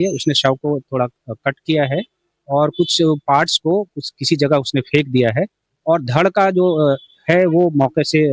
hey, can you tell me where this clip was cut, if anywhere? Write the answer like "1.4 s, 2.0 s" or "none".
none